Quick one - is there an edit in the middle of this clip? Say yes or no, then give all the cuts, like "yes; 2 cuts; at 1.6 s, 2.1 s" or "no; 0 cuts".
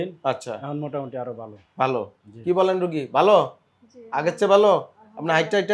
no; 0 cuts